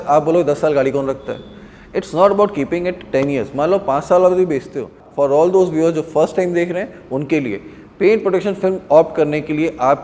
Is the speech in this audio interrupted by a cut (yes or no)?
yes